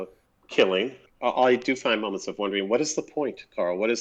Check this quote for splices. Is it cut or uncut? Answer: cut